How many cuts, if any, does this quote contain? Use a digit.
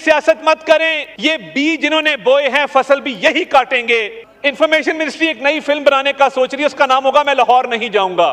2